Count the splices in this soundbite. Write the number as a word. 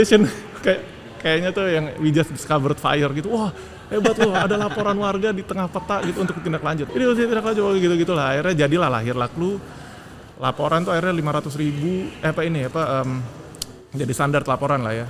one